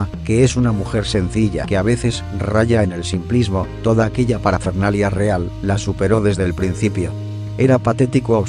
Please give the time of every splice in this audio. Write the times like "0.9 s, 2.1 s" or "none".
none